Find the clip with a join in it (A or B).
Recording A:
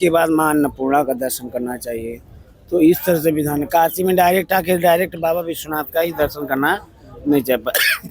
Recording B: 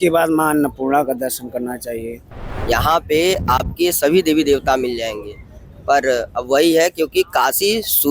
B